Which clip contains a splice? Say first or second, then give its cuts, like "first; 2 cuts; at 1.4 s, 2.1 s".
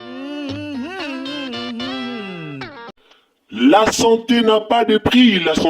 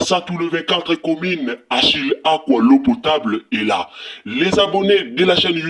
first; 1 cut; at 2.8 s